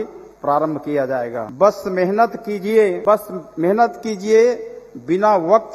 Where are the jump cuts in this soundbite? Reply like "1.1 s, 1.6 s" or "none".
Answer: 1.4 s, 3.0 s